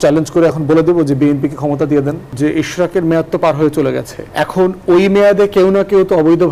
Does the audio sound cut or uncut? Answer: cut